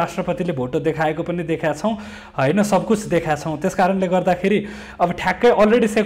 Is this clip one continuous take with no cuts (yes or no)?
yes